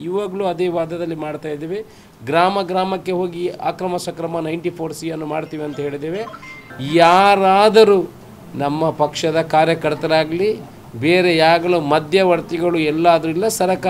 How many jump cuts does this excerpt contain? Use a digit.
1